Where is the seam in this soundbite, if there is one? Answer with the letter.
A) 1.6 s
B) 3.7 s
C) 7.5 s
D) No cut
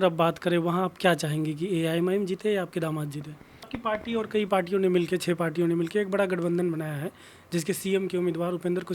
B